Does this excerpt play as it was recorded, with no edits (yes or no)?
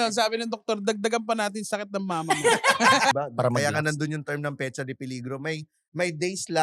no